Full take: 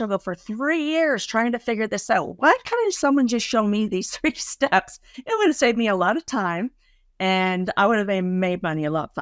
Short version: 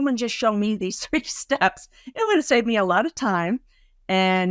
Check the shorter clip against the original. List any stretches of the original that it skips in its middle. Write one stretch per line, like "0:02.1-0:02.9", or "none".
none